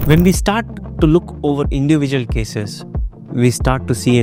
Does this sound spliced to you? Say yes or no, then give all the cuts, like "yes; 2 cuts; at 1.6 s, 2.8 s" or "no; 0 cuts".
no; 0 cuts